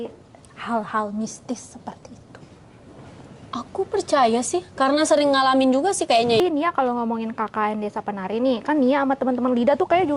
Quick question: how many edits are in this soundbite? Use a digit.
1